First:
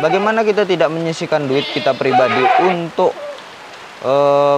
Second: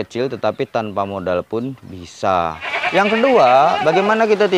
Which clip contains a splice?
second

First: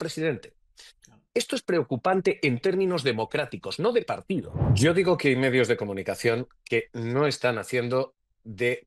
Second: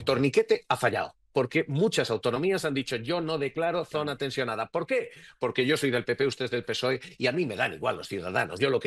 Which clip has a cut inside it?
first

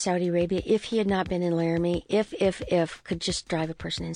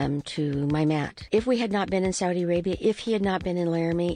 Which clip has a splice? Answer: second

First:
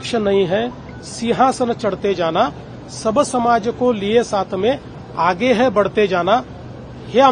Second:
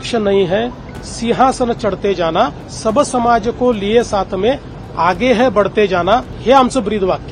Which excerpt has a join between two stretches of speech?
second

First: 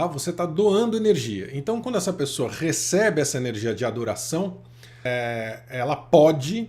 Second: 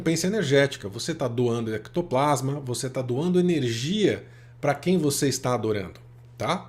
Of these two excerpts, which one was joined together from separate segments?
first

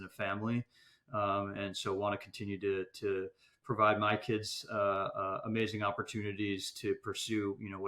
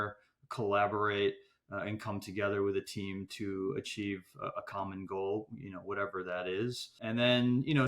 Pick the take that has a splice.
second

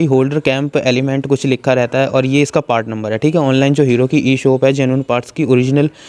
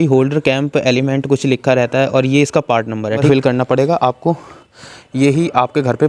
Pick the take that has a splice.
second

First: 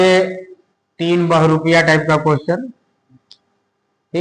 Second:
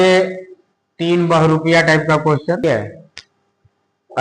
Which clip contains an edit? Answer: second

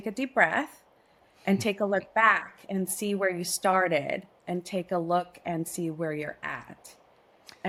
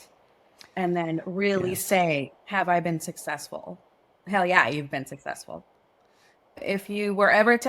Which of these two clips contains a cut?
second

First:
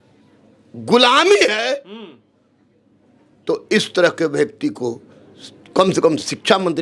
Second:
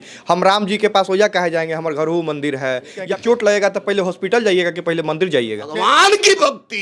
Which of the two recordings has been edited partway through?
second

